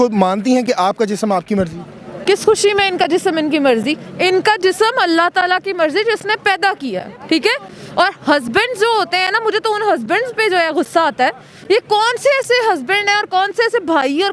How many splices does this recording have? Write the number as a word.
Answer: one